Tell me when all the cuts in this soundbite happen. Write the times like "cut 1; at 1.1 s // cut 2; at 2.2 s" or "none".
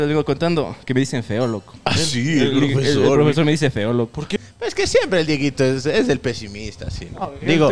cut 1; at 4.4 s